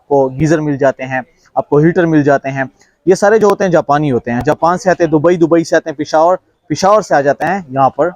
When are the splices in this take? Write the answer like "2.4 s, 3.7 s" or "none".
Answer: none